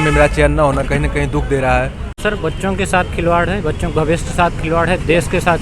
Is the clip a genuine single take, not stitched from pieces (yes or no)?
no